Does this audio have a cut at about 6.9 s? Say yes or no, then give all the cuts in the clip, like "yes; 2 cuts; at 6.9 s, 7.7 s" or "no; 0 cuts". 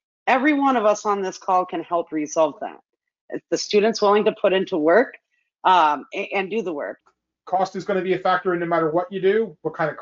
yes; 1 cut; at 6.9 s